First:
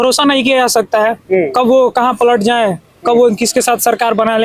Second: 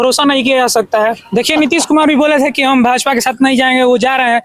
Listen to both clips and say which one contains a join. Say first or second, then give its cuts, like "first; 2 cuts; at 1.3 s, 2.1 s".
second; 1 cut; at 1.2 s